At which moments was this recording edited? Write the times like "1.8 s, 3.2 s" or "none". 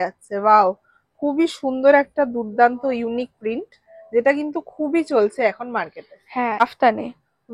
6.6 s